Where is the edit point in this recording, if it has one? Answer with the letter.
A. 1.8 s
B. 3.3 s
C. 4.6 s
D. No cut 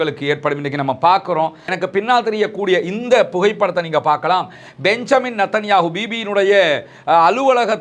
A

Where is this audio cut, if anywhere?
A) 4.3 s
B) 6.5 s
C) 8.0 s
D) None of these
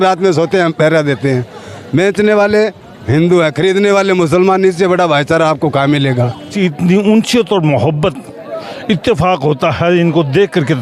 B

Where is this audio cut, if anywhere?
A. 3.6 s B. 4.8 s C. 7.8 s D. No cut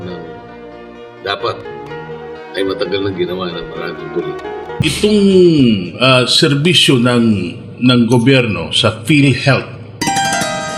B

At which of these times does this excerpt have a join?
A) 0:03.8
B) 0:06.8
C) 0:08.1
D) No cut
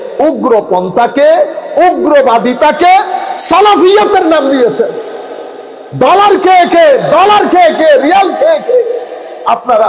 D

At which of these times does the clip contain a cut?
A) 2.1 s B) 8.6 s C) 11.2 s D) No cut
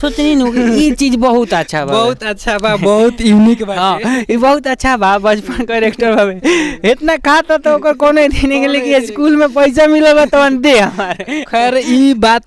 D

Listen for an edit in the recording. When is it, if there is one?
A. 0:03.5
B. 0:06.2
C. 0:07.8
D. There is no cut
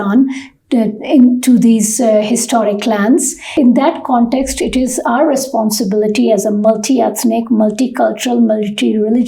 A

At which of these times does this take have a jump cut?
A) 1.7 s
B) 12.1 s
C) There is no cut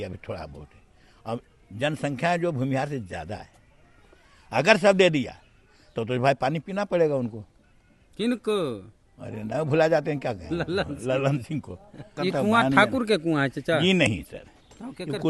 B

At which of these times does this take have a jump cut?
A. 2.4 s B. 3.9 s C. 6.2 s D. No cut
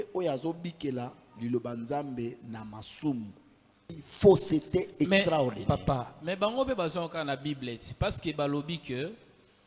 B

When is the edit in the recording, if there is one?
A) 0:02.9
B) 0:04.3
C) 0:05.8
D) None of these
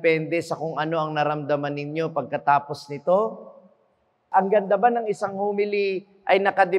B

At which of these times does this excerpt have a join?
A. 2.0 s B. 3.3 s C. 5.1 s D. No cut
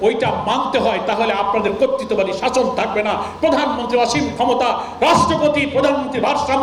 D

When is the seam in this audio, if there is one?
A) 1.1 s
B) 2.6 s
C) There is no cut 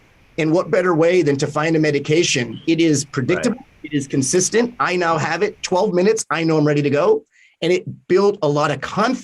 B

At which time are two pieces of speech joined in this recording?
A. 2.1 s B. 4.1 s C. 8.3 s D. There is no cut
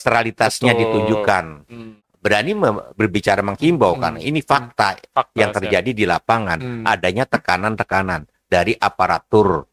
A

